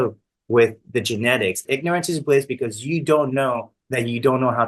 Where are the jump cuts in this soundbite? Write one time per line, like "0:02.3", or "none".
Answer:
0:01.6